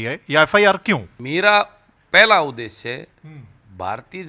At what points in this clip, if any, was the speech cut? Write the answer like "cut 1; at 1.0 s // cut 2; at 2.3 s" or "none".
cut 1; at 1.1 s